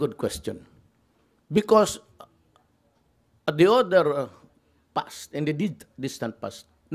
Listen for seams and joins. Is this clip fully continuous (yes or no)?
no